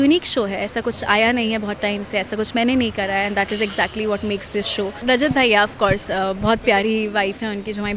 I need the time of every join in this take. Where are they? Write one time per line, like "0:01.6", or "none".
0:05.0